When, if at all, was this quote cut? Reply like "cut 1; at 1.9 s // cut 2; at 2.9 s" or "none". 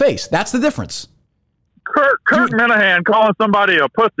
none

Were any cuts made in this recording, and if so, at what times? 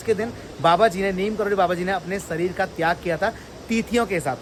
none

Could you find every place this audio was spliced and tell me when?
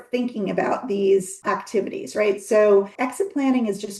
cut 1; at 1.4 s // cut 2; at 2.9 s

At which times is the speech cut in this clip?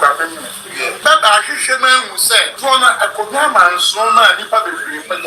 cut 1; at 1.0 s // cut 2; at 2.5 s

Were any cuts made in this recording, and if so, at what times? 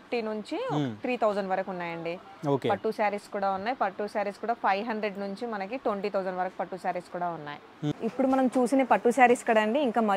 cut 1; at 7.9 s

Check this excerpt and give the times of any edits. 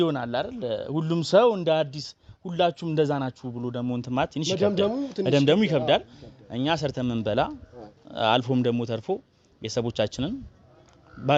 none

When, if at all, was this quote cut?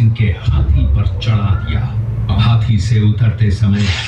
cut 1; at 2.3 s

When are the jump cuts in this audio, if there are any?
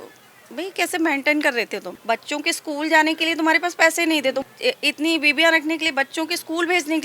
cut 1; at 1.9 s // cut 2; at 4.4 s

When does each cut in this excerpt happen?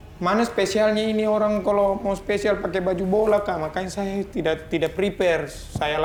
none

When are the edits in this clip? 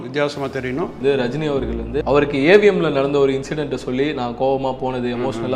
cut 1; at 1.0 s // cut 2; at 2.0 s

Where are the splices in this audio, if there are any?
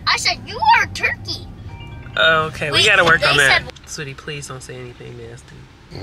cut 1; at 3.7 s

